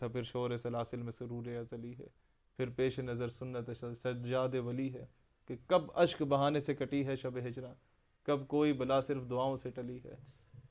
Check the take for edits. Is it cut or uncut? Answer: uncut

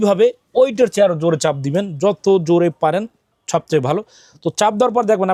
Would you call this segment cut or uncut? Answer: uncut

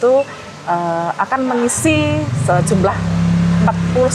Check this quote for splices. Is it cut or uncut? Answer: uncut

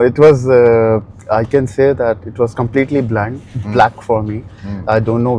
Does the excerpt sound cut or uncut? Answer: uncut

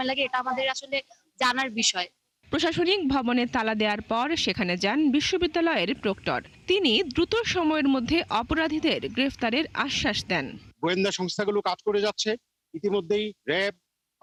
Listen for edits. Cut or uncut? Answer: uncut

